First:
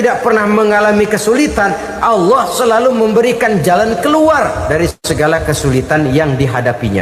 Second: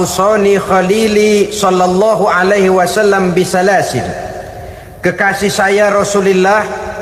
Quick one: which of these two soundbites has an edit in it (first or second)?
first